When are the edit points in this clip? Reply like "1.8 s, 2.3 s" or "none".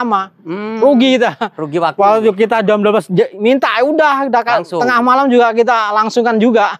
none